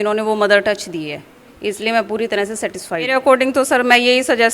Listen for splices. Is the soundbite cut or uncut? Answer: cut